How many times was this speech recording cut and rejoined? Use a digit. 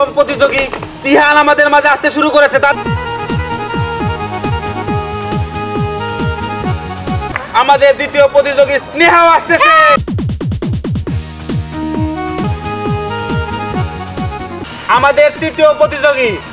6